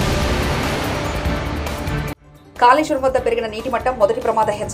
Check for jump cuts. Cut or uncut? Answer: uncut